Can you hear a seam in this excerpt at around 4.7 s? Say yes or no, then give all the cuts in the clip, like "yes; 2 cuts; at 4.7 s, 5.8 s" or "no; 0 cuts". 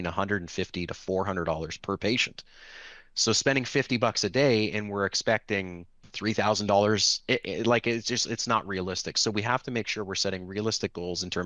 no; 0 cuts